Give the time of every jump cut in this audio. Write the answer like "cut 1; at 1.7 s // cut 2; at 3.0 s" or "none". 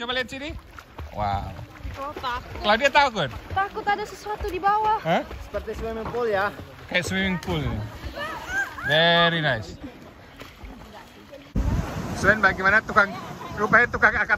cut 1; at 11.5 s